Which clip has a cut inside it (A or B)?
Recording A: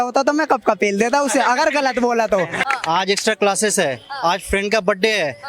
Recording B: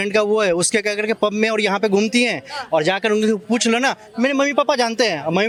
A